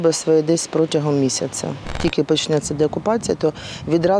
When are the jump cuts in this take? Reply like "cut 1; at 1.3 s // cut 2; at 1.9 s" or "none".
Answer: cut 1; at 2.0 s